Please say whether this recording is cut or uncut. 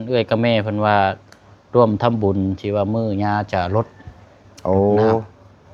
uncut